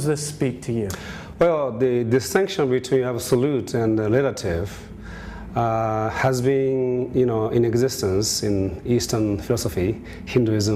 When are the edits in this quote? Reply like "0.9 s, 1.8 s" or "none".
none